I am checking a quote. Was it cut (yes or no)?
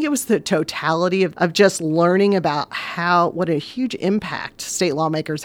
yes